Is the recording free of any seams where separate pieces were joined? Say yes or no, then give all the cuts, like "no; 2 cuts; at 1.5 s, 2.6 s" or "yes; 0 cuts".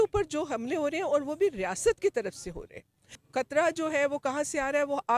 no; 1 cut; at 3.2 s